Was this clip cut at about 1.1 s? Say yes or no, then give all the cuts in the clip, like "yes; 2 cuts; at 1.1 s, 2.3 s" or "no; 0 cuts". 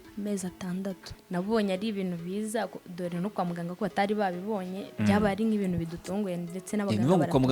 yes; 1 cut; at 1.1 s